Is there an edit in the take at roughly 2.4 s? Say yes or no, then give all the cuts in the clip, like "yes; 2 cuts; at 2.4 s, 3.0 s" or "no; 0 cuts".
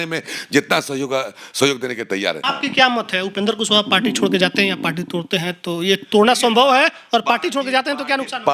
yes; 1 cut; at 2.4 s